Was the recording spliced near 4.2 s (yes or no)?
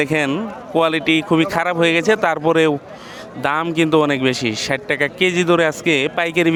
no